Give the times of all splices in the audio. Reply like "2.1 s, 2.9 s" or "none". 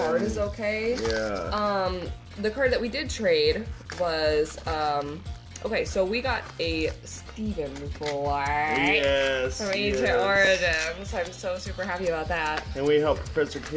5.8 s